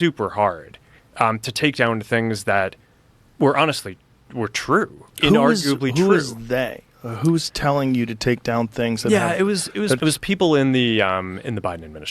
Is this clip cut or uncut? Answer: cut